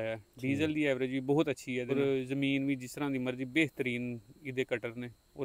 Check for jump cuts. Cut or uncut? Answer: cut